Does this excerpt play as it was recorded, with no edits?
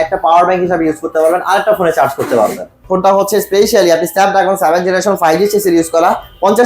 no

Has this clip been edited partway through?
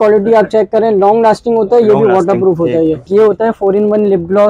yes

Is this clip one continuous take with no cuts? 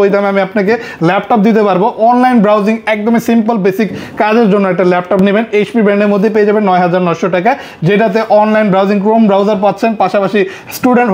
yes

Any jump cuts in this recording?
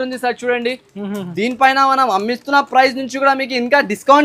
no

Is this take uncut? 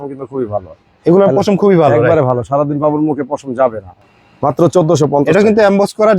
no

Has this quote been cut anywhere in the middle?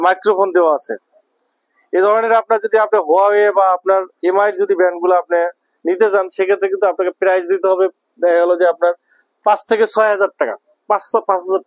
yes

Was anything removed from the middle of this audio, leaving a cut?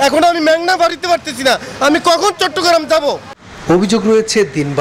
no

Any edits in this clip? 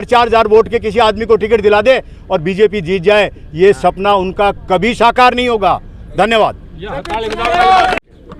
no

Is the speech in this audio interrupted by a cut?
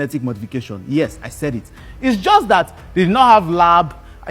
no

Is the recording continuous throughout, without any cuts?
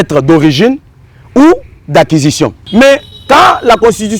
no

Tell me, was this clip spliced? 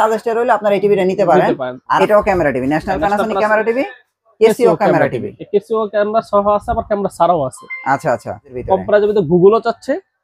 yes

